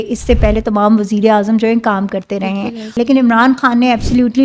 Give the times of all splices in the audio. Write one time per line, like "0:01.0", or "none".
0:02.9